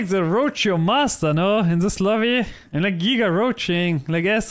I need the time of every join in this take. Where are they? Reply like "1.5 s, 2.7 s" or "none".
none